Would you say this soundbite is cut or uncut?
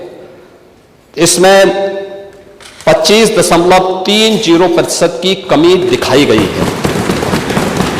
uncut